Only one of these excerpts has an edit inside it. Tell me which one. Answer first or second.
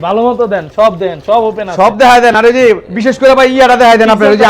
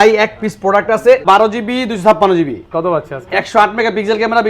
second